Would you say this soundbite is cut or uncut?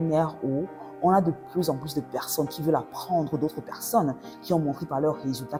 uncut